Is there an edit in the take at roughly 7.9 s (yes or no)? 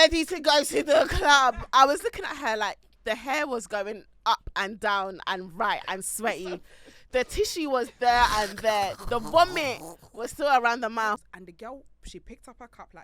no